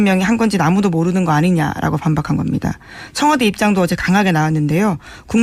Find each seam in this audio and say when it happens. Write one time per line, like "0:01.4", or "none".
0:03.4